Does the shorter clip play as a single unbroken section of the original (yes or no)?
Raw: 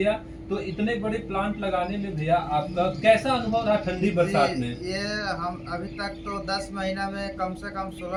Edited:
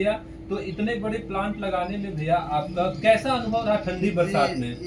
yes